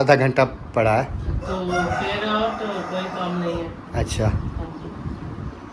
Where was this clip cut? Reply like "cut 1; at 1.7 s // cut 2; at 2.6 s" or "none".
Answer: none